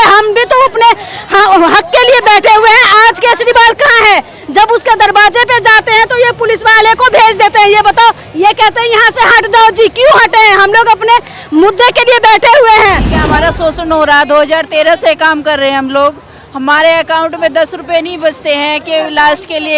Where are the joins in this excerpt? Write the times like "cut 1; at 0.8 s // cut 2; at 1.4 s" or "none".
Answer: cut 1; at 13.1 s